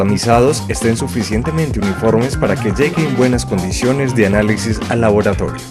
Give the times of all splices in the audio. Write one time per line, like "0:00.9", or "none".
0:04.6